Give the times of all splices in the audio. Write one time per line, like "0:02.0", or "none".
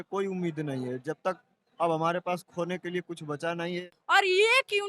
0:03.8